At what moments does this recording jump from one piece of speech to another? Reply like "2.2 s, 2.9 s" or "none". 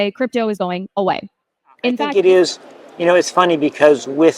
1.7 s